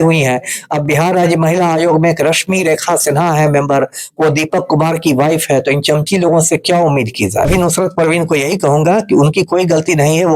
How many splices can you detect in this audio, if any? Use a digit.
1